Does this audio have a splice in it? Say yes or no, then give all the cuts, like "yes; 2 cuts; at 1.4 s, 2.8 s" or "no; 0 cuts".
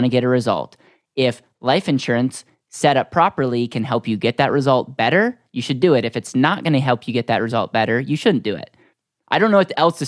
no; 0 cuts